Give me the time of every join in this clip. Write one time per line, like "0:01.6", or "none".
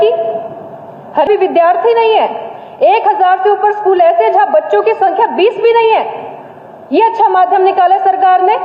0:01.3